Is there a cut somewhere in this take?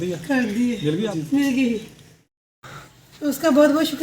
yes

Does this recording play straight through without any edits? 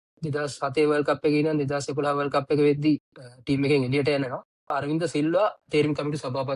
no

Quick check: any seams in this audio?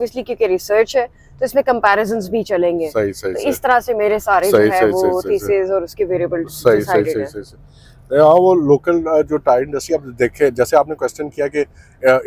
no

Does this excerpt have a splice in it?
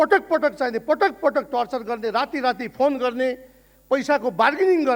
no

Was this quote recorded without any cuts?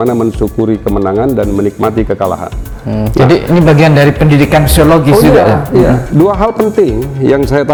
yes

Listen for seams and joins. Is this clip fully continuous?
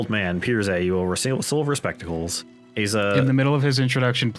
yes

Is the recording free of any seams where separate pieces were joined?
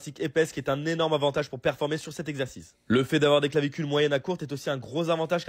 yes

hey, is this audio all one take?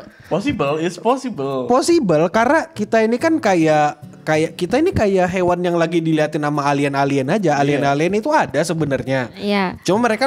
yes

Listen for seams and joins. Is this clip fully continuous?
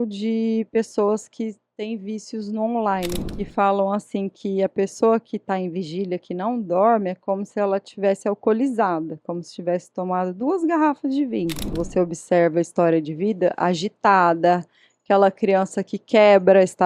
no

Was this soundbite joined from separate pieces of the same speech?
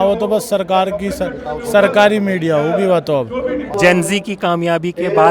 yes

